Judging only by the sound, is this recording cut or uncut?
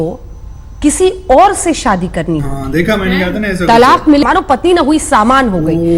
cut